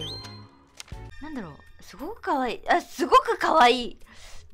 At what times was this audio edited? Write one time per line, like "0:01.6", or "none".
0:01.0